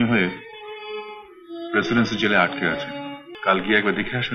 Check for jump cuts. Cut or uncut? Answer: cut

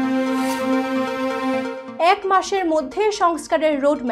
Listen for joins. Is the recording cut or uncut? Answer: cut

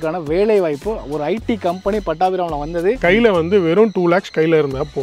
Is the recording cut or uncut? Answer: cut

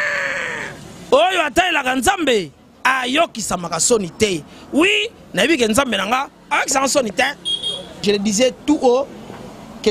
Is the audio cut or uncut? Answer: cut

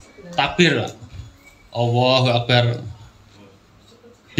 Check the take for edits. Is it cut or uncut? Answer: uncut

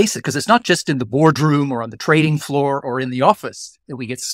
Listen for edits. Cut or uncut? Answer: uncut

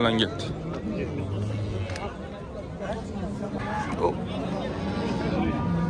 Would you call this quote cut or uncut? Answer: cut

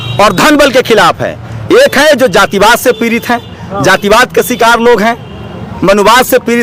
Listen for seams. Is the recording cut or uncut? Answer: uncut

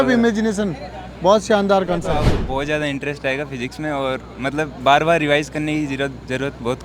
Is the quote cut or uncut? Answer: cut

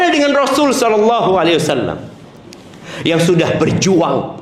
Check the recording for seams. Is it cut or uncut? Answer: uncut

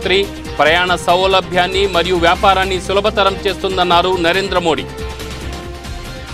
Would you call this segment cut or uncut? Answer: cut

